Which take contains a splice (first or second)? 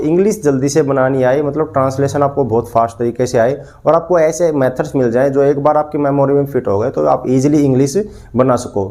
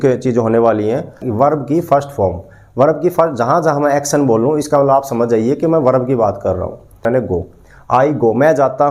second